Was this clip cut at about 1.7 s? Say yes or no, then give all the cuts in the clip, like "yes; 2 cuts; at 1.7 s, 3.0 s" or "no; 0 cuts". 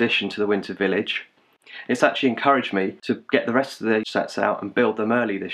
no; 2 cuts; at 3.0 s, 4.1 s